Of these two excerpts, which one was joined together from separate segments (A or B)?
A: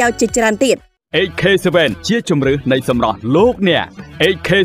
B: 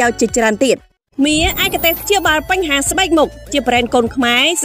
B